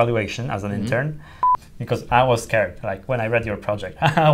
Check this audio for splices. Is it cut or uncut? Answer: cut